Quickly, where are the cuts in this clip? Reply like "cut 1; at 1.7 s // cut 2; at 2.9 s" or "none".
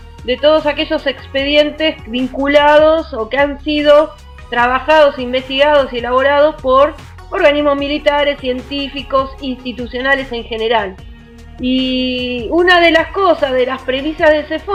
none